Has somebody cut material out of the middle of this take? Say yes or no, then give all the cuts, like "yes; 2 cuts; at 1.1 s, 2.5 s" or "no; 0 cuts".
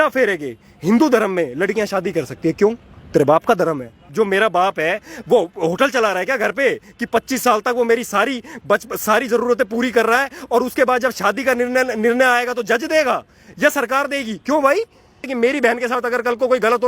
yes; 2 cuts; at 4.0 s, 15.2 s